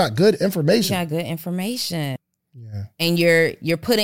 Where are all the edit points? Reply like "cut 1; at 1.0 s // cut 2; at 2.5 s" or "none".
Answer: cut 1; at 2.1 s